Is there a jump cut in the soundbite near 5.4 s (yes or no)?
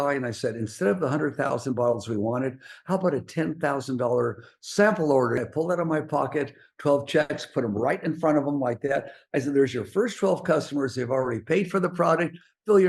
yes